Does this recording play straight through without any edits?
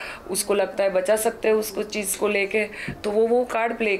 yes; 0 cuts

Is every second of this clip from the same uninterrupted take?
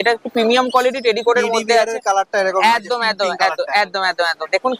yes; 0 cuts

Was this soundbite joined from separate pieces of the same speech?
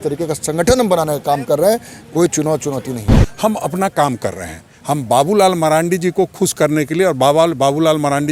yes; 1 cut; at 3.1 s

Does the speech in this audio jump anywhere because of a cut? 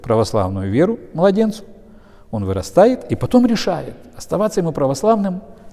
no; 0 cuts

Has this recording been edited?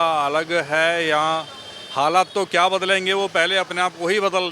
no; 0 cuts

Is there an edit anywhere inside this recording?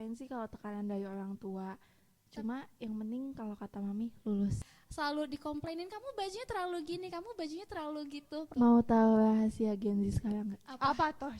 yes; 2 cuts; at 4.7 s, 8.5 s

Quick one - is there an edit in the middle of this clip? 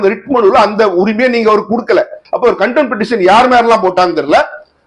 yes; 1 cut; at 2.2 s

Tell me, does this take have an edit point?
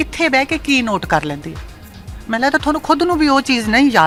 no; 0 cuts

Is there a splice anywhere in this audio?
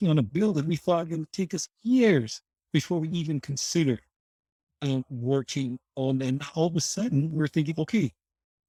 no; 0 cuts

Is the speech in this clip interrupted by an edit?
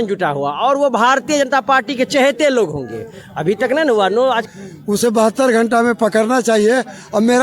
yes; 1 cut; at 4.5 s

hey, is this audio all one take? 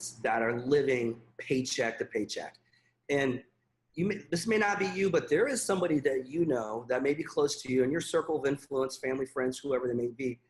yes; 0 cuts

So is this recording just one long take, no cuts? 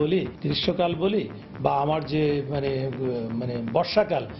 yes; 0 cuts

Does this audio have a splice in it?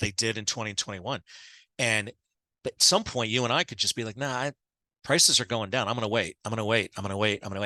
no; 0 cuts

